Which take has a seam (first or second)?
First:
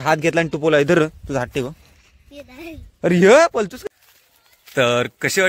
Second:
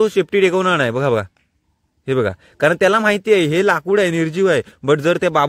first